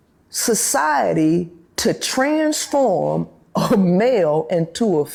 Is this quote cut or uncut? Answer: uncut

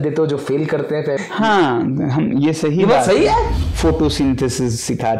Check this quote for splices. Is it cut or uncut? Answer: cut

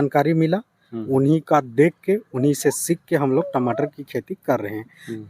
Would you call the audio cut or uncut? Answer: uncut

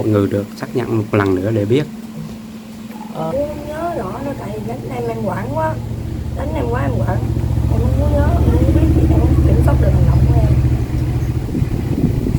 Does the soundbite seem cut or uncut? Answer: cut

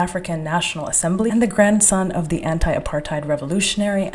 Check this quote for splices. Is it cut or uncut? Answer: cut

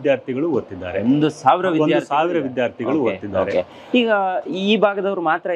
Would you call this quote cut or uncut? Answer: uncut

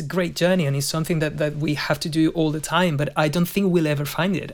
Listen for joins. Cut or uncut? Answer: uncut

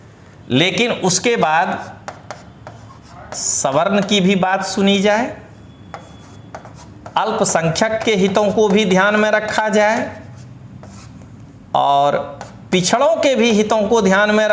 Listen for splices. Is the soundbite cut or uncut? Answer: uncut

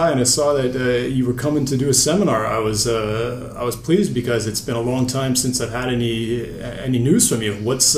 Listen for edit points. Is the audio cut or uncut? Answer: cut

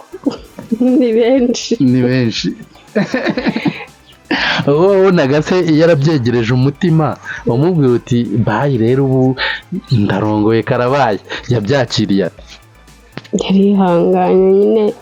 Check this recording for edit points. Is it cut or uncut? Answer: uncut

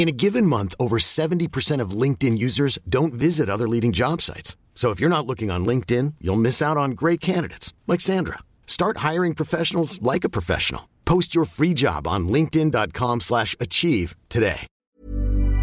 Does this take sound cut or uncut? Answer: cut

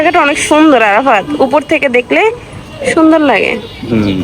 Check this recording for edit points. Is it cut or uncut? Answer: uncut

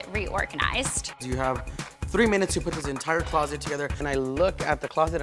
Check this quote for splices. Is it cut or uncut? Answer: cut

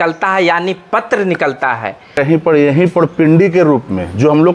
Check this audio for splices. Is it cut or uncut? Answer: cut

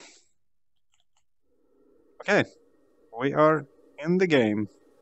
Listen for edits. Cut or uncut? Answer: uncut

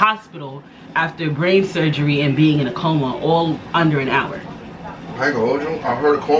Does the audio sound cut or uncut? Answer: uncut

